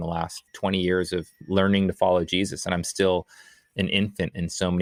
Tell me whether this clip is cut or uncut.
uncut